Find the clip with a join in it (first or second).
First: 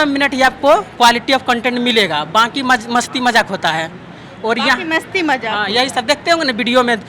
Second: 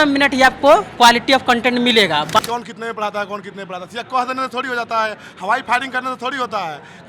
second